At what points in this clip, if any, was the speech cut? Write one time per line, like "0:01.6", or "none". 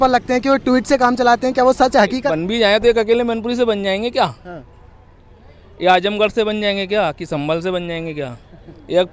0:02.3